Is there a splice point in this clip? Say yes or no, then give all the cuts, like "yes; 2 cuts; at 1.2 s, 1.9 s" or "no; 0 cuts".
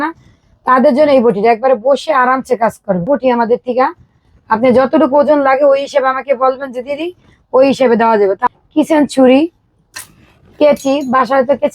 yes; 2 cuts; at 3.1 s, 8.5 s